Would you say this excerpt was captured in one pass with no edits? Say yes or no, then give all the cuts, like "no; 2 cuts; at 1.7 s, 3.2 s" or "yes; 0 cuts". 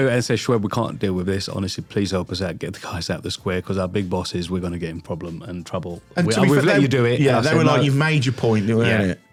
yes; 0 cuts